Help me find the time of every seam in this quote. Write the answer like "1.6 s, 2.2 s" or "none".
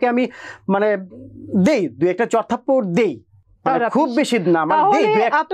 none